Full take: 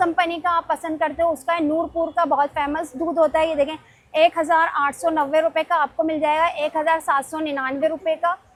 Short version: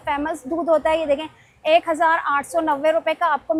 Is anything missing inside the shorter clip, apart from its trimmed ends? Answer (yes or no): no